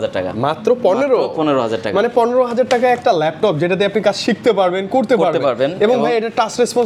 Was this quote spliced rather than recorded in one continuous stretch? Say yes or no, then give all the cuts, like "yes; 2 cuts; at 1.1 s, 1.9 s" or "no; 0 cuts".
no; 0 cuts